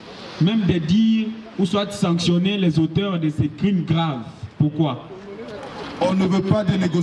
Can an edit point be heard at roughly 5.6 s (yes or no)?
yes